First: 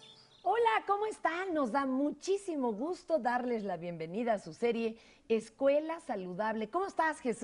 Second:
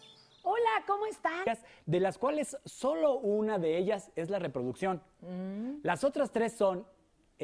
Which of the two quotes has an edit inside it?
first; 1 cut; at 1.4 s

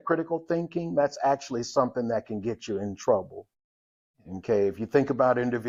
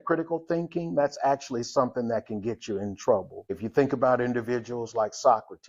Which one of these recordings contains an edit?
second; 1 cut; at 3.6 s

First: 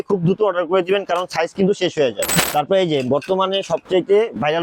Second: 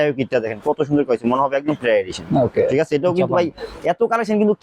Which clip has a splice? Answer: first; 1 cut; at 2.3 s

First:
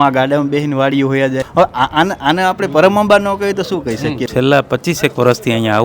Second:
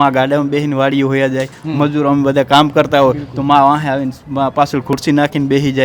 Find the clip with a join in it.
first; 2 cuts; at 1.5 s, 4.3 s

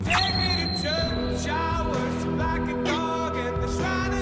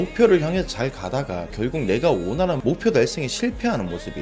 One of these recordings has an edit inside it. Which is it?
second; 2 cuts; at 1.5 s, 2.6 s

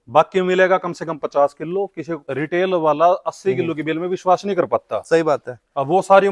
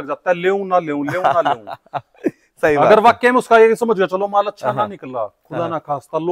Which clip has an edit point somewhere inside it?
first; 1 cut; at 2.2 s

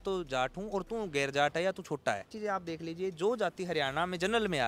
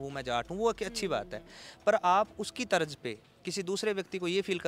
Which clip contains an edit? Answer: first; 1 cut; at 2.3 s

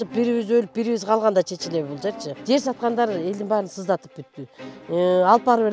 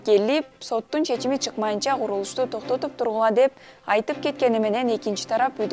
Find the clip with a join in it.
first; 1 cut; at 2.3 s

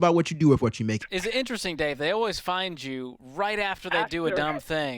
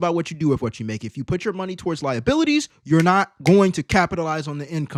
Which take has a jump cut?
first; 1 cut; at 1.0 s

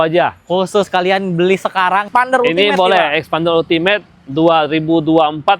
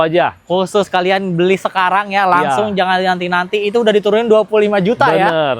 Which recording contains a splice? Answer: first; 1 cut; at 2.1 s

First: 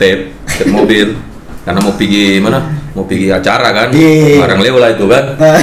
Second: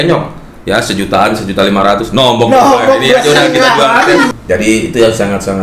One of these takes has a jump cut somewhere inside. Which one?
second; 1 cut; at 4.3 s

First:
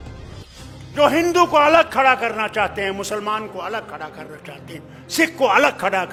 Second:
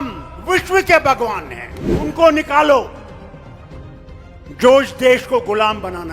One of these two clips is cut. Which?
second; 3 cuts; at 2.0 s, 3.0 s, 4.5 s

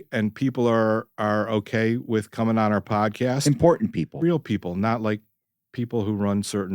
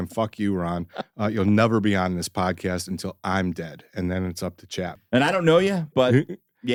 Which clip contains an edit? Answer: first; 1 cut; at 4.1 s

